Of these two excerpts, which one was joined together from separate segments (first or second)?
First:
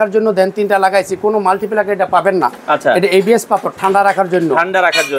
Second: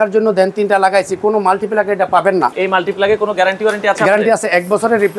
second